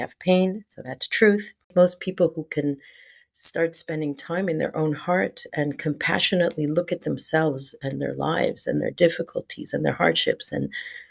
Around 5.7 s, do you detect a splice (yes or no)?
no